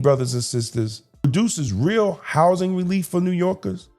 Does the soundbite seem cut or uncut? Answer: cut